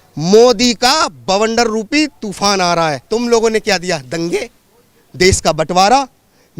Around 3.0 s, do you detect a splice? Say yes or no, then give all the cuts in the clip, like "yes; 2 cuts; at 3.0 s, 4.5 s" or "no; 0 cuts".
yes; 1 cut; at 3.0 s